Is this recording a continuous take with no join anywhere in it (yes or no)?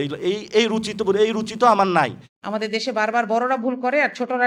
no